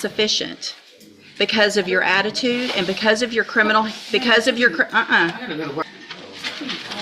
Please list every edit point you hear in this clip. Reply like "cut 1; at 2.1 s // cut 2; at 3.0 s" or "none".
cut 1; at 5.8 s